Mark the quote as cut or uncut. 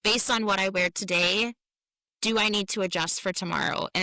uncut